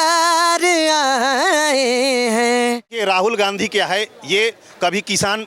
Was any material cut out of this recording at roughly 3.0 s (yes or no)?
yes